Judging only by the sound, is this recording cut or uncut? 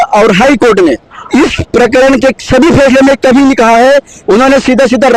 cut